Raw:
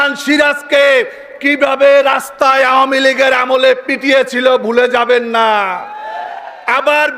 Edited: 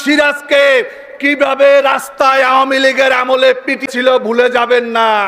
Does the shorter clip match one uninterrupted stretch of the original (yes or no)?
no